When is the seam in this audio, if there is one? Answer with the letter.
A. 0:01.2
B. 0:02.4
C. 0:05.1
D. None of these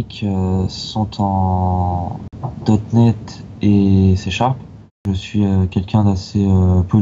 C